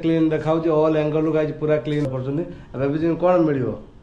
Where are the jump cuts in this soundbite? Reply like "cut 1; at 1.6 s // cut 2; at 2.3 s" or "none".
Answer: cut 1; at 2.1 s

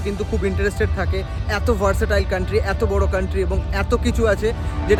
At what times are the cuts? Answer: none

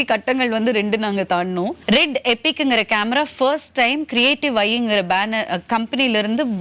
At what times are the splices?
cut 1; at 1.8 s

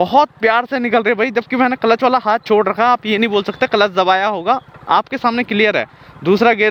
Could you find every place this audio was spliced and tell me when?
none

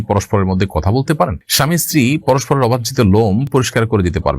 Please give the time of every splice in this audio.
cut 1; at 1.4 s

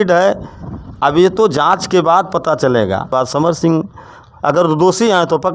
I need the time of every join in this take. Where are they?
cut 1; at 3.1 s

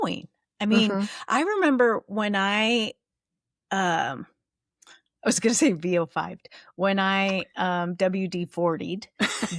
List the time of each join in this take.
none

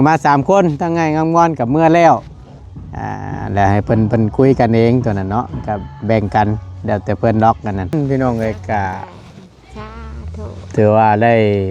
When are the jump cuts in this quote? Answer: cut 1; at 7.9 s

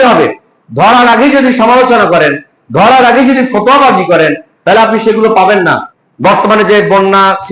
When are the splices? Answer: cut 1; at 5.9 s

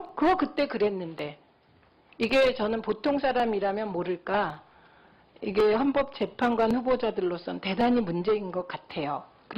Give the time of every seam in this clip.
cut 1; at 6.8 s

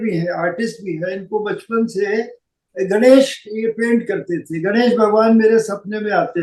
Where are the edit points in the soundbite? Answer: none

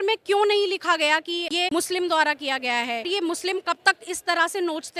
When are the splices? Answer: cut 1; at 1.6 s // cut 2; at 3.0 s

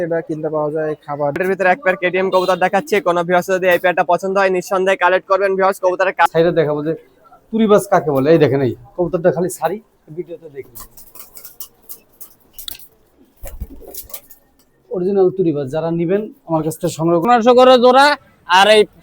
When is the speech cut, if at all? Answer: cut 1; at 1.4 s // cut 2; at 6.3 s // cut 3; at 13.1 s // cut 4; at 17.3 s

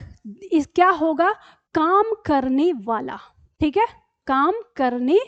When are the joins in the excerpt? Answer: none

